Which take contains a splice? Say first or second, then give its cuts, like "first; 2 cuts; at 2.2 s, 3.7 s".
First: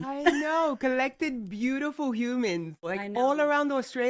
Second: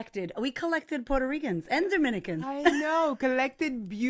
first; 1 cut; at 2.9 s